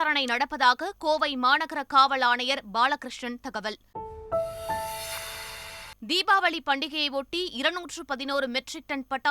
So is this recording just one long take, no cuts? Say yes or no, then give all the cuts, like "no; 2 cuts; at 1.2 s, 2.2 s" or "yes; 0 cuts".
no; 2 cuts; at 3.8 s, 6.1 s